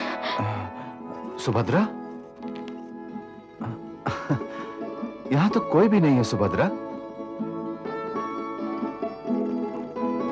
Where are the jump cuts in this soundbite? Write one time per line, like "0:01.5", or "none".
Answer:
none